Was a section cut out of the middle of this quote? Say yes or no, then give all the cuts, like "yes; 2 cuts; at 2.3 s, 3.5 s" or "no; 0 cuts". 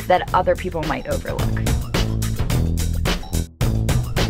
no; 0 cuts